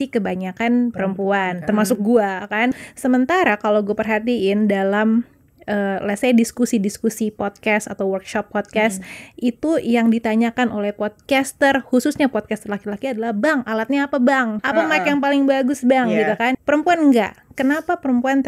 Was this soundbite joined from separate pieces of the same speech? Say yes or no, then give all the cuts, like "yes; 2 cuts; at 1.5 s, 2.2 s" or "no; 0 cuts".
yes; 3 cuts; at 2.8 s, 14.6 s, 16.5 s